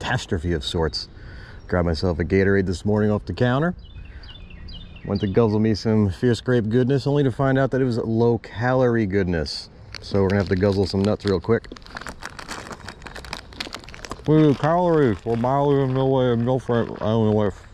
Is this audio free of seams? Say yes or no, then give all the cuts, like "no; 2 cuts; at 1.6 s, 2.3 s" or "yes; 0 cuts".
yes; 0 cuts